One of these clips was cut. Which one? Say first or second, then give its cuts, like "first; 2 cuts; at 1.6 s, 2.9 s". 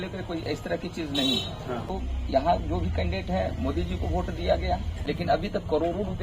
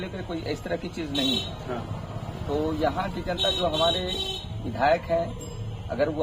first; 2 cuts; at 1.9 s, 4.9 s